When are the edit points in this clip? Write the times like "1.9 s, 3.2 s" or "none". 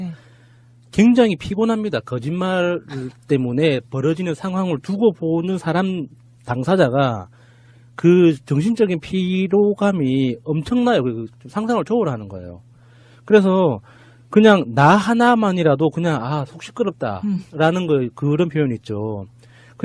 6.5 s